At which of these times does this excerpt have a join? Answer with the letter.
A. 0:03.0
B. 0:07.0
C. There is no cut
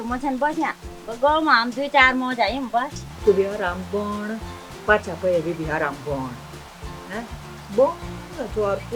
A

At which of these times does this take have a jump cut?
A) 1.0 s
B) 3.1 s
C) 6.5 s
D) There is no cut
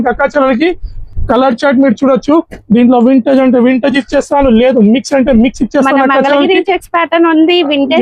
A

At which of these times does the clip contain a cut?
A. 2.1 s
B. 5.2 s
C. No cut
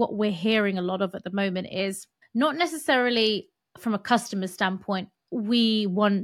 A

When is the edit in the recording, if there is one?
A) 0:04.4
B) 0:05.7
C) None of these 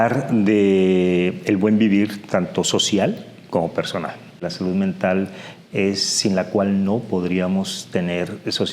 A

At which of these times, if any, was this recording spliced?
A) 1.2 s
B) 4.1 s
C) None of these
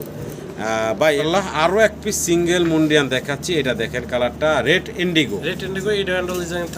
A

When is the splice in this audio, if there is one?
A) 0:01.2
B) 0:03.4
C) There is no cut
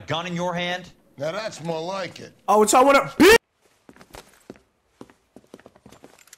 B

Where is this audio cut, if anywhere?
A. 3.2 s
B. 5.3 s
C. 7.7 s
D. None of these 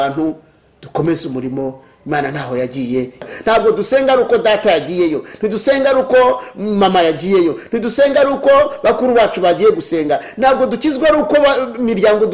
A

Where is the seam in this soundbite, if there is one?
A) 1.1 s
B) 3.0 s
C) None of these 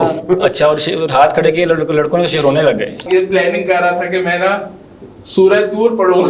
B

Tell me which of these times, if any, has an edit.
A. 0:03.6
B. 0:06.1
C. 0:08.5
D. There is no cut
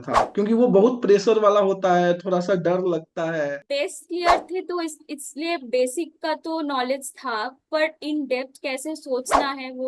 A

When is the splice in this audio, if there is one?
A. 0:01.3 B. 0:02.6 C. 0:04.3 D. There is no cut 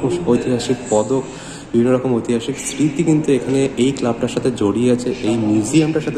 D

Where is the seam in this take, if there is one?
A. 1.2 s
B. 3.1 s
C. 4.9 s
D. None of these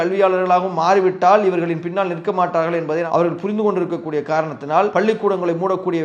C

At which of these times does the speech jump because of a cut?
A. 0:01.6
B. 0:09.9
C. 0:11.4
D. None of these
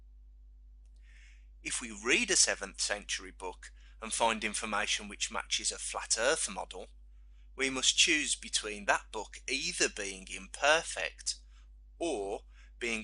B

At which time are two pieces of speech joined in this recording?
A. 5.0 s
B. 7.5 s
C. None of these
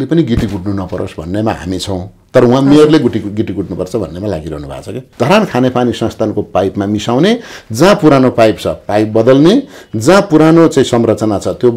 A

